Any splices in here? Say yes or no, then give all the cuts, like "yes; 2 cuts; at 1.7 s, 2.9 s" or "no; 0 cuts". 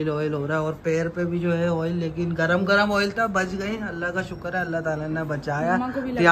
no; 0 cuts